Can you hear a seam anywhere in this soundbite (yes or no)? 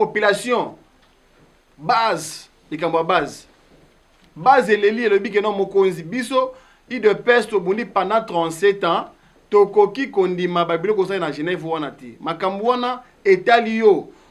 no